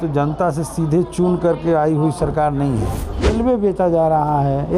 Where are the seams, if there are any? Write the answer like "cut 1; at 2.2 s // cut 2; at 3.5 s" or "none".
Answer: cut 1; at 3.3 s